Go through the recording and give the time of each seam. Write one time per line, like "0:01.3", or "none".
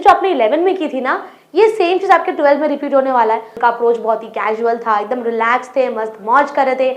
0:03.5